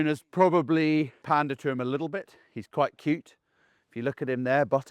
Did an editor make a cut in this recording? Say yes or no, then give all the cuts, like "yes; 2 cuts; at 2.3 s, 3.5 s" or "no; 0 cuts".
yes; 1 cut; at 1.2 s